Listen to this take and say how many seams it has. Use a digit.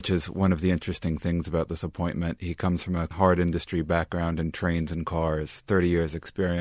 1